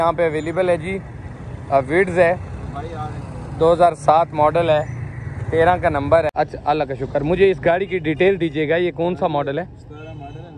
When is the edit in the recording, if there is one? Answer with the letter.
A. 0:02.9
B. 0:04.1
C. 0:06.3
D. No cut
C